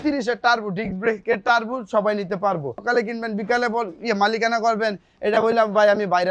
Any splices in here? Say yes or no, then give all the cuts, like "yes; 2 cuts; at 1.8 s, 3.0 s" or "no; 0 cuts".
yes; 1 cut; at 2.8 s